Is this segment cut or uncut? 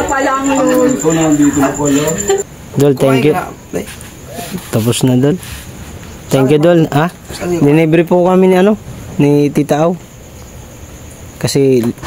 cut